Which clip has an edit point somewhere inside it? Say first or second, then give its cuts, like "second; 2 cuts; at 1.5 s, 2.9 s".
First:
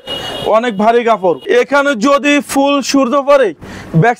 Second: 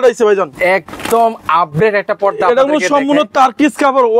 first; 1 cut; at 1.4 s